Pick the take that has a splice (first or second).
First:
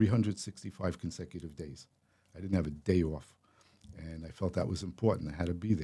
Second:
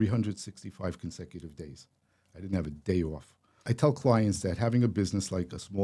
second